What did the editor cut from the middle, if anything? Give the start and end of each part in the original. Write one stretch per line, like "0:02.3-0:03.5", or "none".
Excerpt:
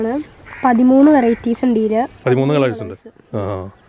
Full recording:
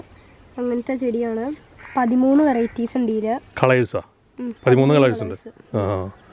0:03.5-0:04.5

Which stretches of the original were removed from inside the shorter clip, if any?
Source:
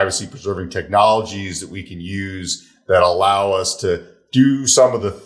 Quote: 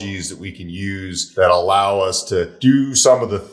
0:02.5-0:02.7
0:04.0-0:04.2

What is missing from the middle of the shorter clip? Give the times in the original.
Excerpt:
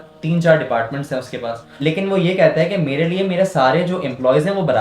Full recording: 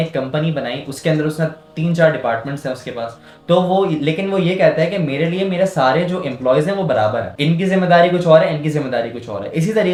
0:03.3-0:04.0

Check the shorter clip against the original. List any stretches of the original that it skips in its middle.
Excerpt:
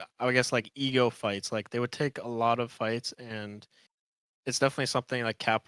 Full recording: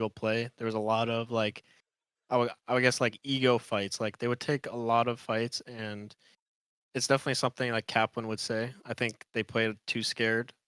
none

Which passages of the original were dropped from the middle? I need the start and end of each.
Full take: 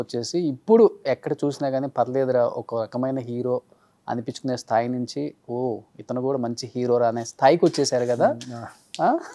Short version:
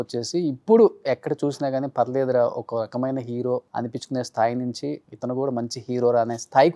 0:03.7-0:04.0
0:05.4-0:05.9

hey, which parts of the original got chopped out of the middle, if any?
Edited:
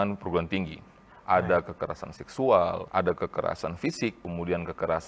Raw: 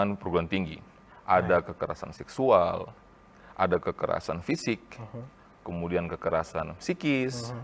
0:02.8-0:03.5
0:04.9-0:05.6

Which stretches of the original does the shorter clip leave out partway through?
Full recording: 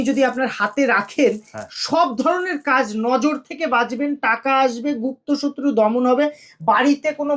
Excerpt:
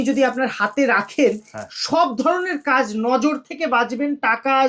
none

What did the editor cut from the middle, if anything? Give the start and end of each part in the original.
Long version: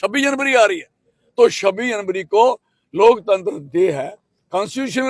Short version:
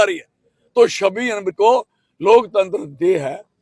0:02.1-0:02.3

